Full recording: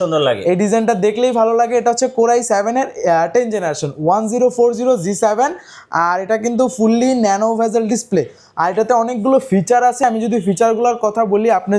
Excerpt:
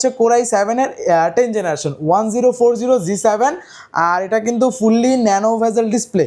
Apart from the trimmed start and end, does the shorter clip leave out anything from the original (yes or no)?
no